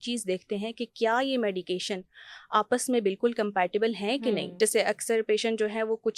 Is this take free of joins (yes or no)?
no